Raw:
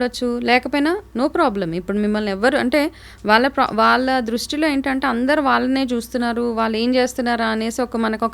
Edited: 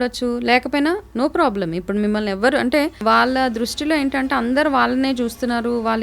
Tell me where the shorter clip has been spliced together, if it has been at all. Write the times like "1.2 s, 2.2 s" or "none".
3.0 s